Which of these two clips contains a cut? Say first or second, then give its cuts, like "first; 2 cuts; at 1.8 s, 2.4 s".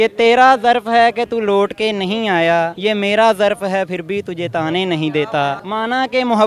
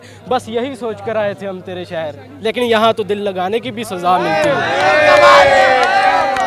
first; 2 cuts; at 2.7 s, 5.6 s